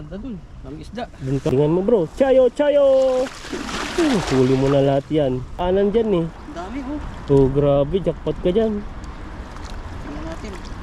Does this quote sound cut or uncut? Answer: cut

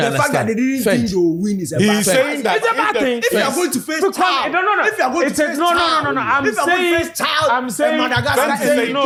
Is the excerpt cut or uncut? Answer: uncut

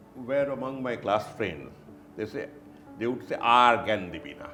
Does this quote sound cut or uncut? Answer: uncut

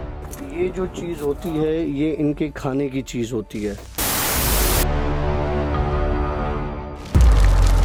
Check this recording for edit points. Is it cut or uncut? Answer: uncut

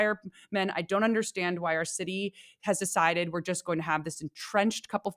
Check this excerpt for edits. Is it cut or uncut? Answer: uncut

